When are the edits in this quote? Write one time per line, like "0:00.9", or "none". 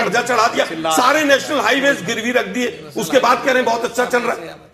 none